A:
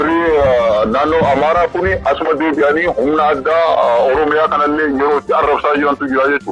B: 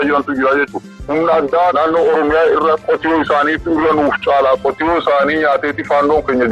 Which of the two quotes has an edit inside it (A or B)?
B